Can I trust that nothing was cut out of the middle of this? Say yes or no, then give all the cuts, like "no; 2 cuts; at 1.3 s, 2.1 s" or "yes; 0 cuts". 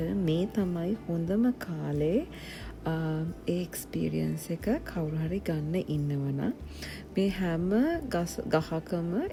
yes; 0 cuts